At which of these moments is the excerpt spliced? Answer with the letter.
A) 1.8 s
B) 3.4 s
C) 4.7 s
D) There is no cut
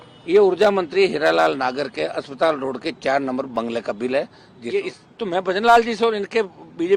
C